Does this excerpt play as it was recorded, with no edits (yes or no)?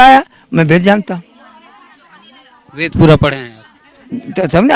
yes